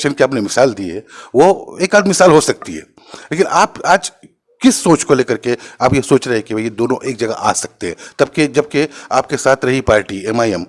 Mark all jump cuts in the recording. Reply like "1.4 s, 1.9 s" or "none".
none

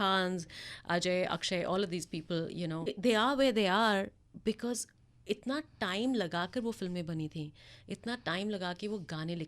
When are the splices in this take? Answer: 2.9 s

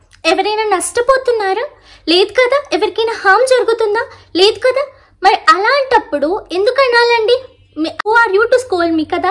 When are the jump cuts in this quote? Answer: 8.1 s

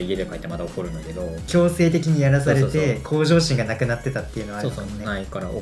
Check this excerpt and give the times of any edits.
1.4 s

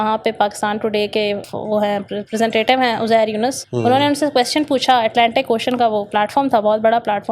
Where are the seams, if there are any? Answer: 1.4 s, 3.7 s

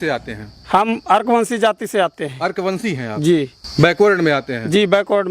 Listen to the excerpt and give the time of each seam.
none

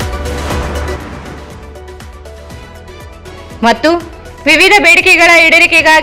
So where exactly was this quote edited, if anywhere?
none

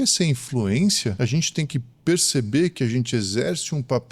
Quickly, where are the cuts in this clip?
1.2 s

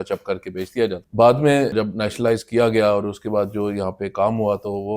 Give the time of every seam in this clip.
1.0 s, 1.7 s

